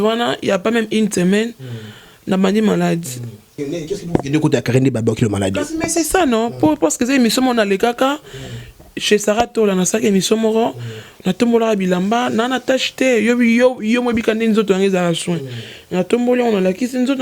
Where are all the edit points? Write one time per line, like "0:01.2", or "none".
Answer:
0:03.6